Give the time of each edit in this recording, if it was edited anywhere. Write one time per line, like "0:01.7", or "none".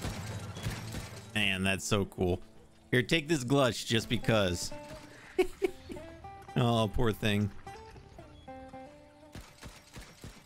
0:01.1